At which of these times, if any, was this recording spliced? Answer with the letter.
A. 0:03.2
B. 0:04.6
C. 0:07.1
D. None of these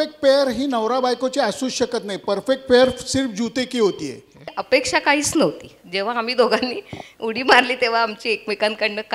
B